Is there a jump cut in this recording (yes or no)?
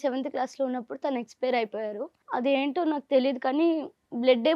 yes